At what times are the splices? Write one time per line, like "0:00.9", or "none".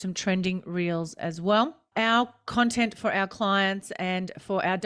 0:01.8